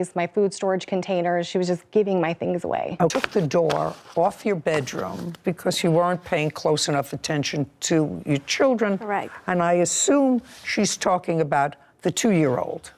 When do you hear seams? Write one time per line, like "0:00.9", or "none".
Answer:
0:03.1